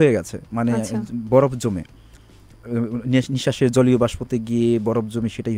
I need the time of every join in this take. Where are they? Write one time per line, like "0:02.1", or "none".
none